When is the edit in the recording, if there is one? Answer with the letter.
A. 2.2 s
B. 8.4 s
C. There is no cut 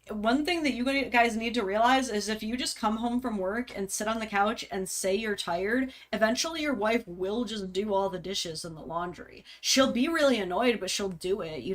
C